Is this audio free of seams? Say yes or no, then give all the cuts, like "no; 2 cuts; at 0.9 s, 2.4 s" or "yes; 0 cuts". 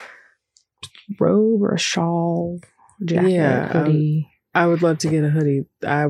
yes; 0 cuts